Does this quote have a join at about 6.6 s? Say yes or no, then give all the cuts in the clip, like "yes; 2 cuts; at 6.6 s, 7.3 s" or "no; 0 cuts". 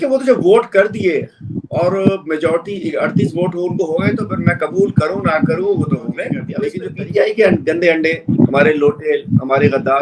yes; 1 cut; at 6.6 s